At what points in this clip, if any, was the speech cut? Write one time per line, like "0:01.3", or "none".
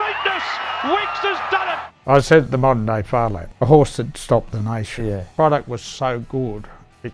0:01.9
0:03.4
0:05.3